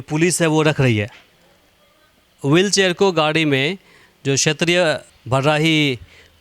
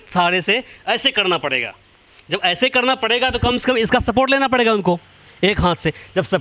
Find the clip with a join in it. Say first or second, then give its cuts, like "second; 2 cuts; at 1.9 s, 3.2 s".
first; 1 cut; at 5.1 s